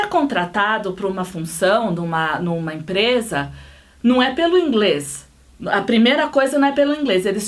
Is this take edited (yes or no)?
no